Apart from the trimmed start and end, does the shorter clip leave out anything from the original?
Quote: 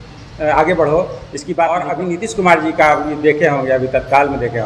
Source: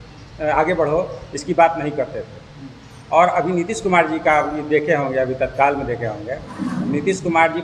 yes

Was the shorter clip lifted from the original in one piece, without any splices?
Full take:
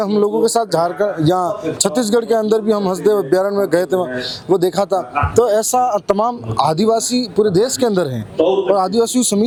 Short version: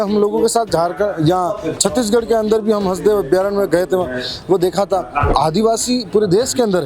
no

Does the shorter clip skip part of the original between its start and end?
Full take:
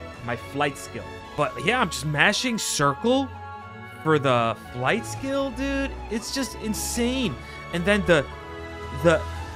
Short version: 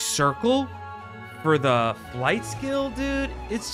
no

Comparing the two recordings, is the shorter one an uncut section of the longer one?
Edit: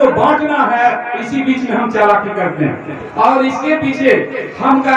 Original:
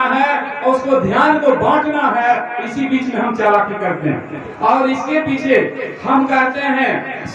yes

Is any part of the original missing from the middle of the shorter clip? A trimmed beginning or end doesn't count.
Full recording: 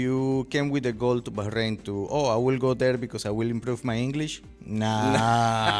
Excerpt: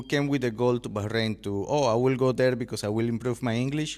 no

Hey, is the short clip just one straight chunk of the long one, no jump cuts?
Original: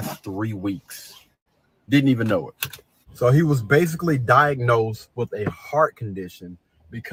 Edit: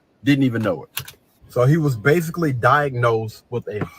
yes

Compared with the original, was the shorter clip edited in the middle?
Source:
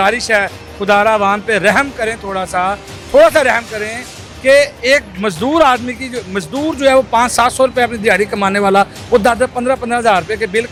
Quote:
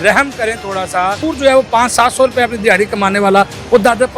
yes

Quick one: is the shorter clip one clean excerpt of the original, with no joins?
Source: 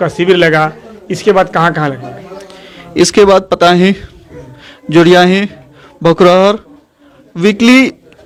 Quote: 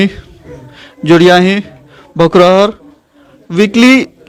yes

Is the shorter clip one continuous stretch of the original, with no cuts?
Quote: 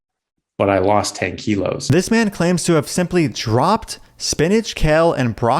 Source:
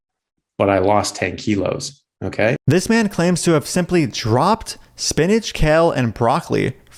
no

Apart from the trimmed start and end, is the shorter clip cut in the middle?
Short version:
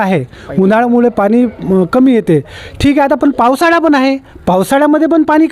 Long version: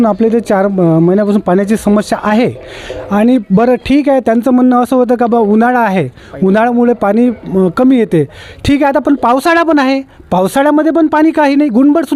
no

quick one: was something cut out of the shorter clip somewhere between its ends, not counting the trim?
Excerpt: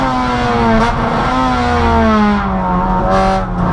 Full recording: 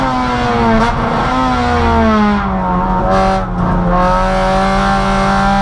no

